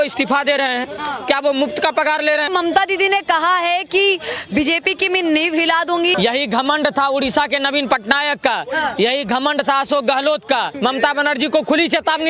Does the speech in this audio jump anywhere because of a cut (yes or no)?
yes